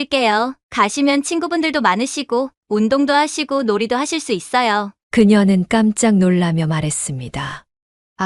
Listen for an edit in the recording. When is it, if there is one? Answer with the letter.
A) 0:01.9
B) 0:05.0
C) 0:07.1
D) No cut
D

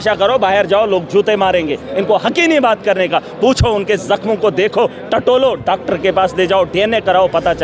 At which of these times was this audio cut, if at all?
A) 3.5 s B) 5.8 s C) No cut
C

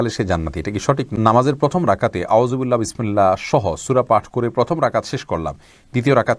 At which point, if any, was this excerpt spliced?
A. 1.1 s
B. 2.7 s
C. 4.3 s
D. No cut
A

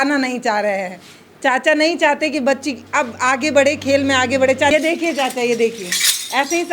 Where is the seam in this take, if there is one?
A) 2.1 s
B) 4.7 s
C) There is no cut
B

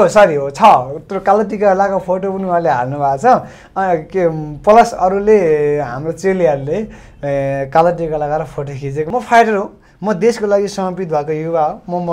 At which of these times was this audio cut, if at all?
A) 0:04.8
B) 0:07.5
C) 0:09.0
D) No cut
C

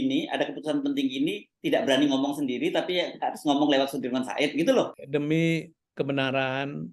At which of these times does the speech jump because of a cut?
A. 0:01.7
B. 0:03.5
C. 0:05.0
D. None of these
C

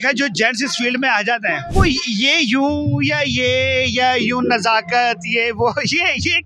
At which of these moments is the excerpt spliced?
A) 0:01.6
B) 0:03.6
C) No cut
A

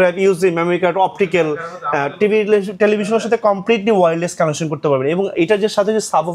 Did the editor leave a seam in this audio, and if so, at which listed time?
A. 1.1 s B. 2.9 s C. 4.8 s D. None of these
D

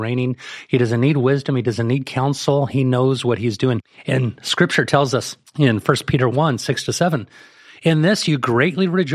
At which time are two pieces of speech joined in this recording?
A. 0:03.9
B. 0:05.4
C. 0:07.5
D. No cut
A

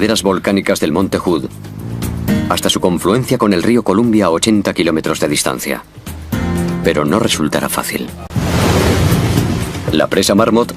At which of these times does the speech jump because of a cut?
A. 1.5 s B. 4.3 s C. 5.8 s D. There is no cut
A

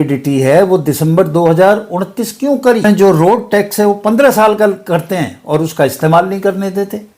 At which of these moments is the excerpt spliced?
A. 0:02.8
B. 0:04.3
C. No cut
A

